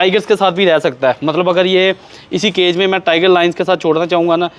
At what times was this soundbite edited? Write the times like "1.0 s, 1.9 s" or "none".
none